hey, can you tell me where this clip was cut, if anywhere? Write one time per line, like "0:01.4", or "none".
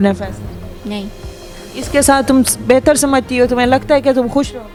none